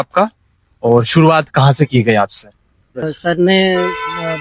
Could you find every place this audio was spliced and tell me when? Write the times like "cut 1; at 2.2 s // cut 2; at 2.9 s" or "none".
cut 1; at 3.0 s